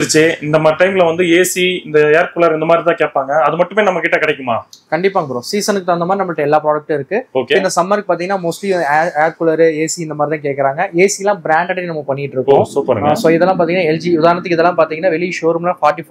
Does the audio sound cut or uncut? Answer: uncut